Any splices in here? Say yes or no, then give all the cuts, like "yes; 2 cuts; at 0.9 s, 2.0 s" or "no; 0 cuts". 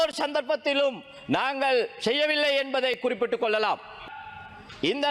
yes; 1 cut; at 4.1 s